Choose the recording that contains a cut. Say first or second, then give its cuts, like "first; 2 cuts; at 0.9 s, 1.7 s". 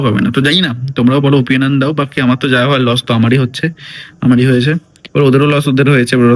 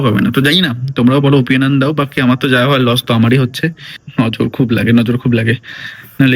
second; 1 cut; at 3.9 s